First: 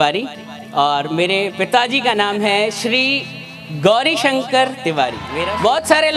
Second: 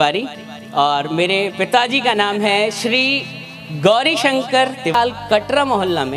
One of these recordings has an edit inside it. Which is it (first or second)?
second